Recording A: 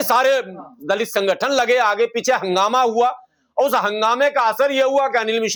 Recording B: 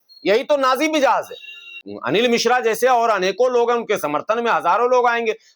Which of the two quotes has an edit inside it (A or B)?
B